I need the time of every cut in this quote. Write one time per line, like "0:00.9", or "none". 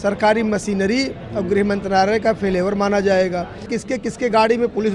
0:03.9